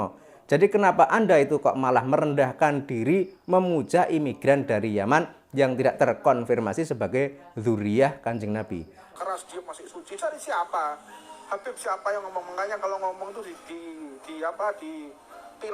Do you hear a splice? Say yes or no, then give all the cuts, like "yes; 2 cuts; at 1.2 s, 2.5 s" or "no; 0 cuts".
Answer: yes; 1 cut; at 9.0 s